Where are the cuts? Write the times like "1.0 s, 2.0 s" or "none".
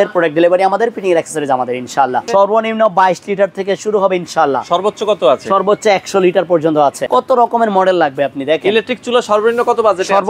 2.2 s, 7.0 s